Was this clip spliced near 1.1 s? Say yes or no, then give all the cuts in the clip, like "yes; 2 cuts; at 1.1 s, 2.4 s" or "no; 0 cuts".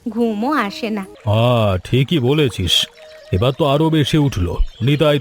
yes; 1 cut; at 1.1 s